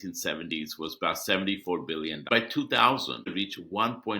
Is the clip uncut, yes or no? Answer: no